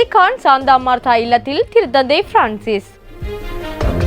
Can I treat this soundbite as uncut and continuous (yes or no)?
no